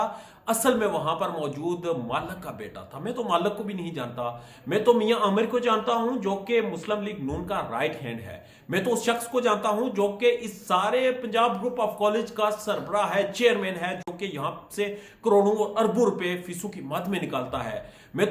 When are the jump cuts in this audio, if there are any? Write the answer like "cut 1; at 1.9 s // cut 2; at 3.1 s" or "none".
none

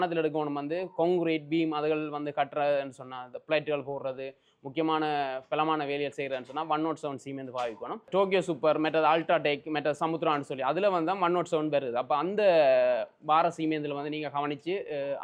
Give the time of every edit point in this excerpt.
none

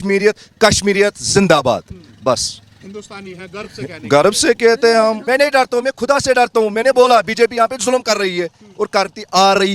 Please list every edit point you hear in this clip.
cut 1; at 5.2 s

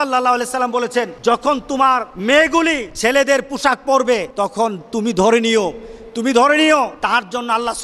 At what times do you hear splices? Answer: cut 1; at 1.1 s // cut 2; at 2.1 s // cut 3; at 2.9 s // cut 4; at 4.3 s // cut 5; at 6.9 s

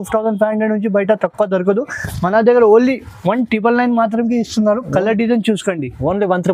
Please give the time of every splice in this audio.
none

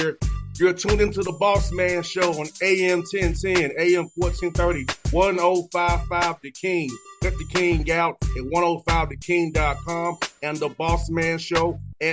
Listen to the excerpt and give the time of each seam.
none

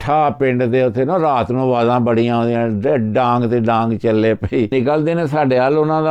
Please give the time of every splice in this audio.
cut 1; at 4.7 s

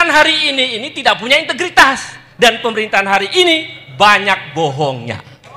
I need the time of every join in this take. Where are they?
none

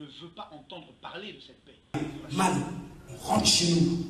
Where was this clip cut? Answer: cut 1; at 1.9 s

